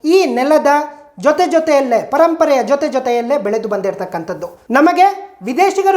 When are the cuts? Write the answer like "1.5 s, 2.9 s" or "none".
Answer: 4.5 s